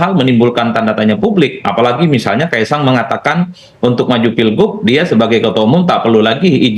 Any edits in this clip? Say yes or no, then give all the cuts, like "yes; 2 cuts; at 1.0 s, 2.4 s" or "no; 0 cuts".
no; 0 cuts